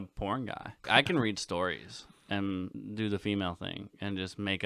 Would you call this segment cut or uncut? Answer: cut